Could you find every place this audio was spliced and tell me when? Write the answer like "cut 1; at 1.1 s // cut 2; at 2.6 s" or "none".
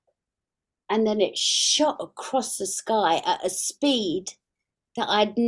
none

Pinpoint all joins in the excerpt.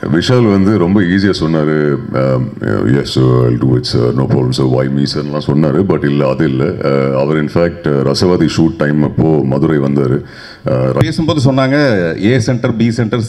cut 1; at 11.0 s

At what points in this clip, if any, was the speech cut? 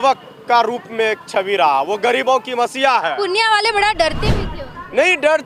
none

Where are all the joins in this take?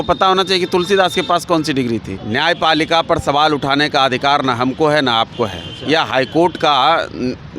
cut 1; at 2.1 s

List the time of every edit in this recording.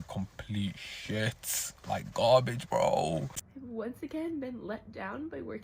cut 1; at 3.3 s

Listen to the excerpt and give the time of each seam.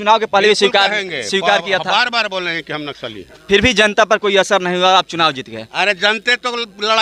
none

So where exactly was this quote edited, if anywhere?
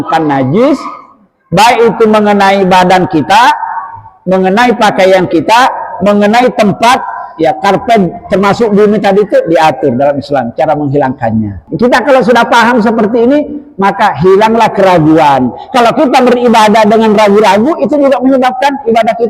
cut 1; at 11.7 s

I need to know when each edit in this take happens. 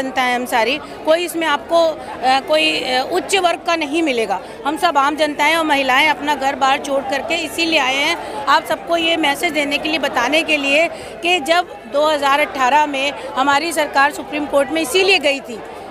none

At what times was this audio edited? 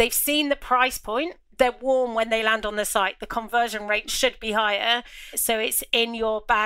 cut 1; at 1.4 s

